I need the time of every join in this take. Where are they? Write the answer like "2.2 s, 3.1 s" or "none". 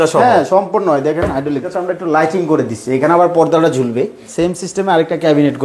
1.7 s, 4.2 s